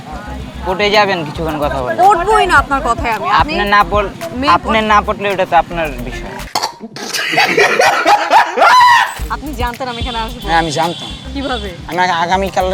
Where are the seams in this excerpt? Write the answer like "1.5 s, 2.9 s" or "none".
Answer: 9.2 s